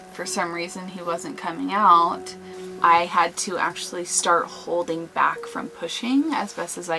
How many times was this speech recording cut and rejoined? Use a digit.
1